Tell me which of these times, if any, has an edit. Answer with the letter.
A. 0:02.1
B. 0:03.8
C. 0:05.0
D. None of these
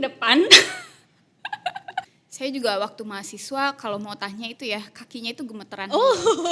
A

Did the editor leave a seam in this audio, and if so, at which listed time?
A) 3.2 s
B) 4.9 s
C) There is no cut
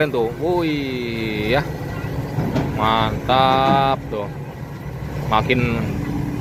C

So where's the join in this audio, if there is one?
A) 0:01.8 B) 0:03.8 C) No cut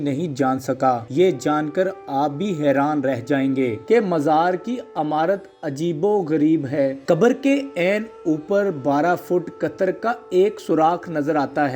B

